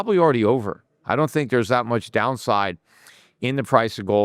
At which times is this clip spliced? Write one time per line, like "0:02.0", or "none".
none